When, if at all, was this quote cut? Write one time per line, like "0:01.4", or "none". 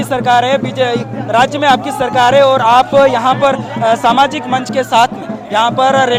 none